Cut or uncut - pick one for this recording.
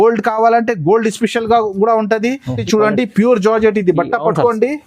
cut